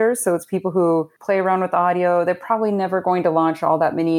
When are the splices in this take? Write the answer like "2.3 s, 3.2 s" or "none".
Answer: 1.1 s